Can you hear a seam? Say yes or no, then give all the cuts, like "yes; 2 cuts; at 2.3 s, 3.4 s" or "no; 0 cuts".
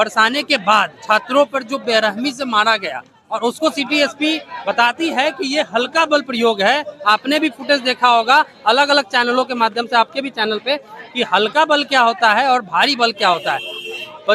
no; 0 cuts